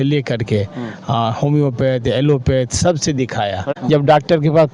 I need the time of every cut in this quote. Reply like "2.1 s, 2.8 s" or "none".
3.7 s